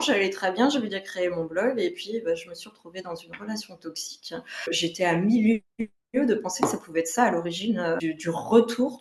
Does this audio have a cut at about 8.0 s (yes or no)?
yes